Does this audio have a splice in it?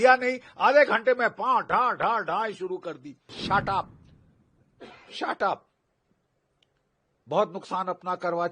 yes; 1 cut; at 3.4 s

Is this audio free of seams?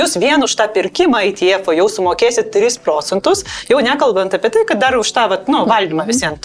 yes; 0 cuts

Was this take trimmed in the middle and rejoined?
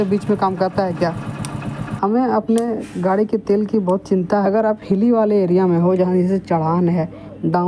yes; 2 cuts; at 1.8 s, 4.4 s

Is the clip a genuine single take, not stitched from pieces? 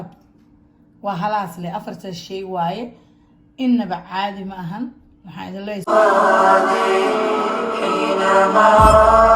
no; 1 cut; at 5.9 s

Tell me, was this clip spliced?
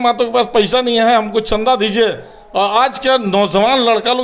no; 0 cuts

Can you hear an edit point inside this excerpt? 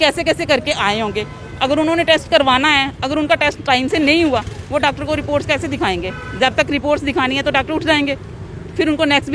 no; 0 cuts

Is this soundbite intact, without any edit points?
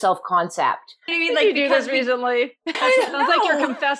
no; 2 cuts; at 1.1 s, 2.8 s

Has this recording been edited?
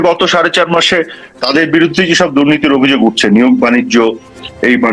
no; 0 cuts

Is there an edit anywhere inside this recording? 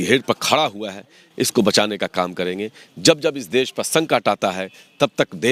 no; 0 cuts

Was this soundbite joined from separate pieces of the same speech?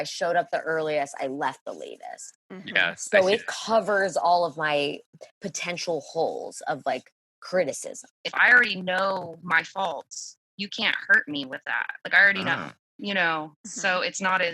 yes; 1 cut; at 8.2 s

